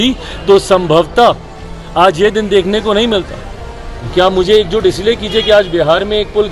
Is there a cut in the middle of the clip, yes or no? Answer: yes